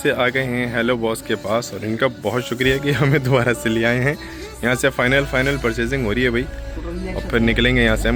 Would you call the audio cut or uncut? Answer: uncut